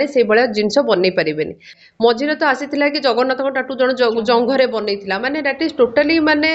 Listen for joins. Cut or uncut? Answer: cut